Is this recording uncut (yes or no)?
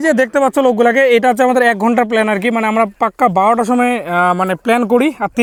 yes